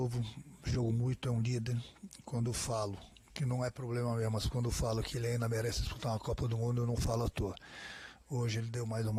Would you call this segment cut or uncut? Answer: uncut